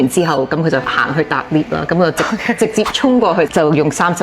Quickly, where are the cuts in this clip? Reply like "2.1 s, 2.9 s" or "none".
1.0 s